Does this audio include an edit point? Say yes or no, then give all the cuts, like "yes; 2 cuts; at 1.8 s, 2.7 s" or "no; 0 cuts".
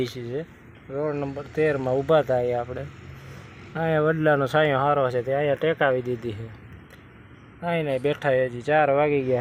no; 0 cuts